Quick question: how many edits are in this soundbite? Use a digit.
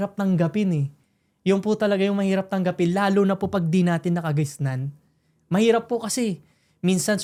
0